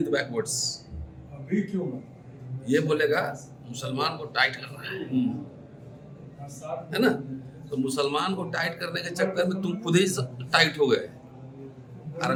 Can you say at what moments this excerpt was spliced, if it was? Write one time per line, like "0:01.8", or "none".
none